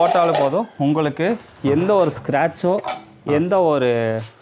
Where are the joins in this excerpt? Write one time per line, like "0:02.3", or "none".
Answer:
none